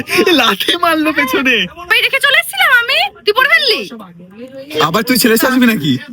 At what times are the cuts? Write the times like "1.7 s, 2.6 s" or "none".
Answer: 1.9 s